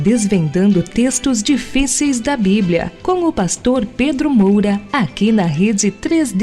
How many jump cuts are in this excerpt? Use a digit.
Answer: 1